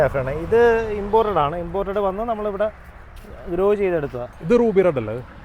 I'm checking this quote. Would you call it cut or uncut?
cut